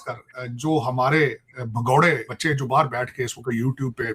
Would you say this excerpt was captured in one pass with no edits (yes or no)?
no